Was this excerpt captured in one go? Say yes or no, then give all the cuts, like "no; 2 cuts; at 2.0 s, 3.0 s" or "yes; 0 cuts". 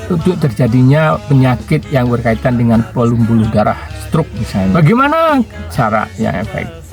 no; 1 cut; at 4.7 s